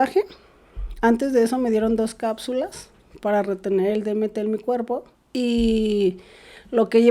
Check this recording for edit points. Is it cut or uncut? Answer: cut